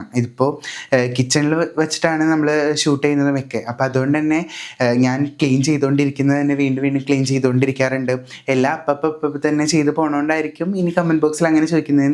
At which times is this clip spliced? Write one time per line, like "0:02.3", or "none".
none